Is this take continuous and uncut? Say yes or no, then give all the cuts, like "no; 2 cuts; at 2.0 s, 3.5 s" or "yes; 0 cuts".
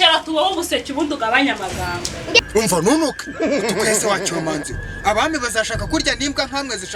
no; 1 cut; at 2.4 s